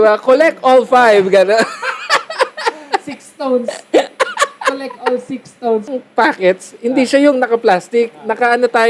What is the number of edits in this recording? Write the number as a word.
one